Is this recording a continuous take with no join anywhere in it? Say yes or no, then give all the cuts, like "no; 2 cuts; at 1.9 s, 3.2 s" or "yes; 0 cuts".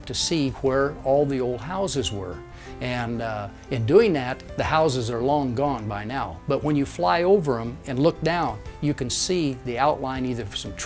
yes; 0 cuts